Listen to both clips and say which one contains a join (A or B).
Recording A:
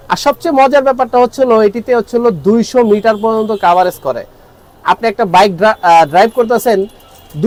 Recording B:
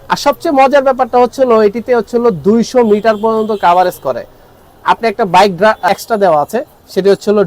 B